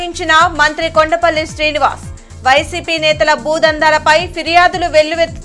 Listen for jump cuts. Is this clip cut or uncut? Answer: uncut